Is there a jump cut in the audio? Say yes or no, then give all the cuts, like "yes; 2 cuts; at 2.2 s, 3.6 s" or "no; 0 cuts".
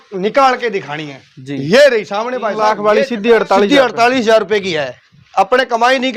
yes; 1 cut; at 2.6 s